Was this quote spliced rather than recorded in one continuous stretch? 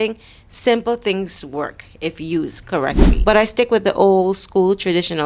yes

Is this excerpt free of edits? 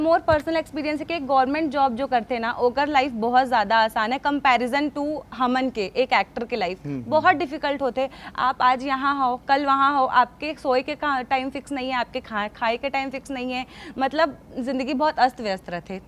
yes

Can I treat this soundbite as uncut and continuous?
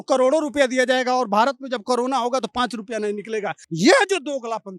no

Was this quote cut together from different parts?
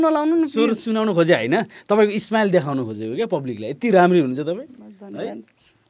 no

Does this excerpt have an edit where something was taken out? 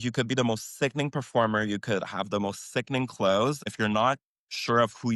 yes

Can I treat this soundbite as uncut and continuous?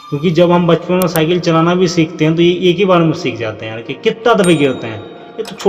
yes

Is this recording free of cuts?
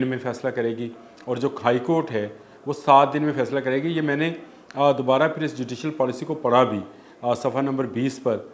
yes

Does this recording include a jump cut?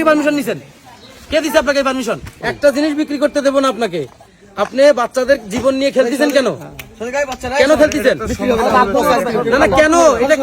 yes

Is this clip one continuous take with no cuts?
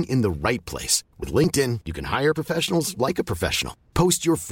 yes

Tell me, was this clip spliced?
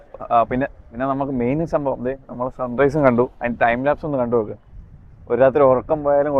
no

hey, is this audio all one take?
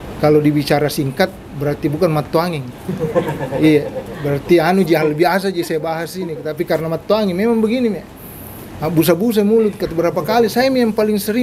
yes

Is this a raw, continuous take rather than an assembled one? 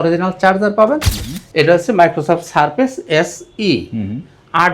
no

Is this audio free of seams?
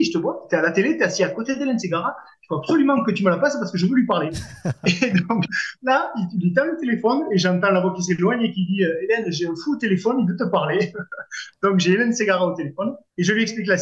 yes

